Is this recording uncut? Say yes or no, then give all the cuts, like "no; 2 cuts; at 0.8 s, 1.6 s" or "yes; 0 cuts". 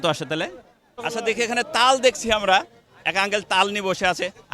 no; 1 cut; at 0.9 s